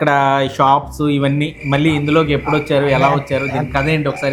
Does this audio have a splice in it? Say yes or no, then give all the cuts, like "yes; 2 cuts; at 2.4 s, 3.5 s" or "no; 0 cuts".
no; 0 cuts